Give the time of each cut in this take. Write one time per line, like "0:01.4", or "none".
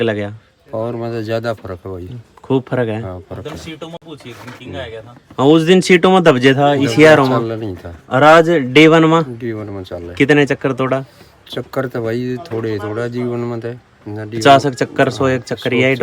none